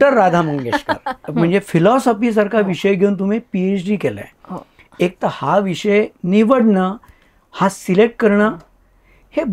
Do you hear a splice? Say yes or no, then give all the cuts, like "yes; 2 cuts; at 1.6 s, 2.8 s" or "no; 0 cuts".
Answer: yes; 1 cut; at 1.2 s